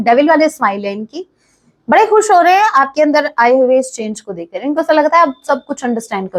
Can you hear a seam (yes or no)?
no